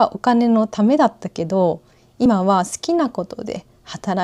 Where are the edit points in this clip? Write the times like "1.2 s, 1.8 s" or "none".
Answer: none